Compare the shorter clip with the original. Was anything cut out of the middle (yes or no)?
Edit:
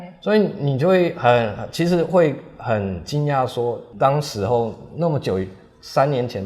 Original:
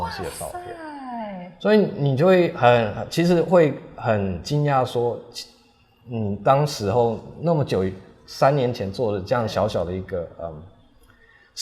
yes